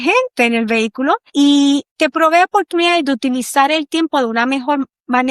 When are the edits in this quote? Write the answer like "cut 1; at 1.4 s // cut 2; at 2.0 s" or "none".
cut 1; at 1.5 s

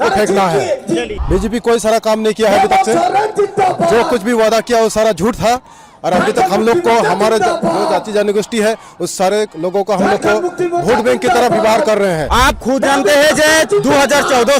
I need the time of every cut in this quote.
cut 1; at 1.1 s // cut 2; at 12.2 s

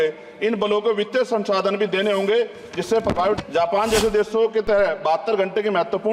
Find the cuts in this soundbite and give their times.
cut 1; at 3.4 s

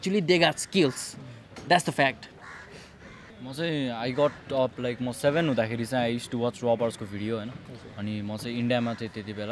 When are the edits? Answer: none

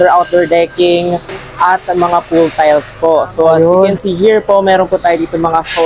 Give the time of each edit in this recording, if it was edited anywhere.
none

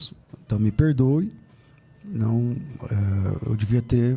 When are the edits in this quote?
none

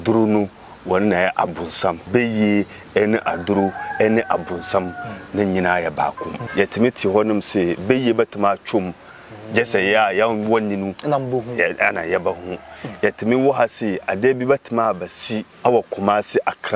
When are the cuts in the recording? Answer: cut 1; at 2.1 s // cut 2; at 6.4 s // cut 3; at 15.5 s

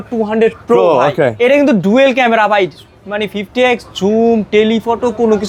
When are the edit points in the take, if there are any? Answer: none

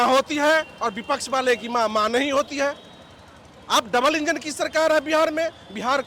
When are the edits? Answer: none

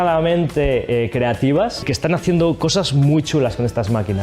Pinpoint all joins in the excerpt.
cut 1; at 1.9 s

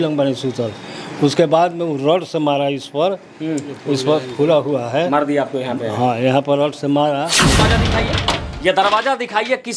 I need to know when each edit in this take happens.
cut 1; at 7.6 s

